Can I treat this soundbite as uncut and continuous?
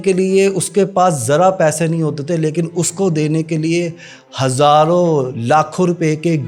yes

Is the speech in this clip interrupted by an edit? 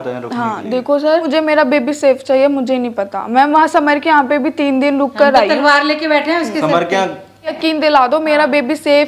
yes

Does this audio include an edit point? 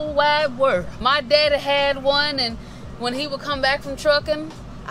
yes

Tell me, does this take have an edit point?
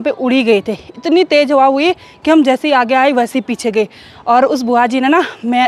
no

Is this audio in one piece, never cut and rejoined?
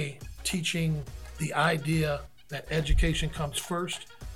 no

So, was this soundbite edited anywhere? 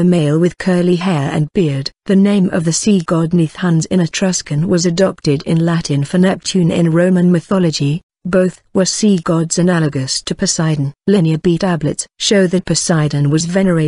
no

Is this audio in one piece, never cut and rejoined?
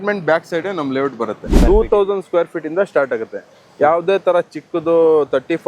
no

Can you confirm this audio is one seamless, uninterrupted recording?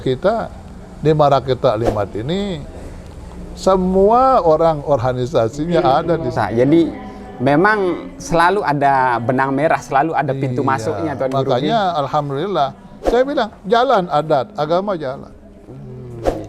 no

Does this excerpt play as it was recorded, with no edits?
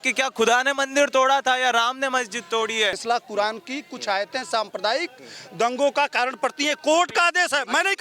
no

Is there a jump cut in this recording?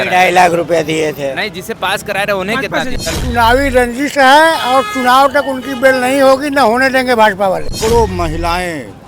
yes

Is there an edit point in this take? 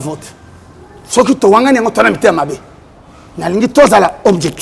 no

